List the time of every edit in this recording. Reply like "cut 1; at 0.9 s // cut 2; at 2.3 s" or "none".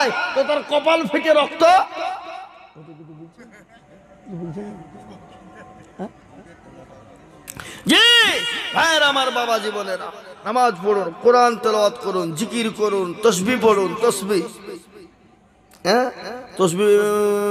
none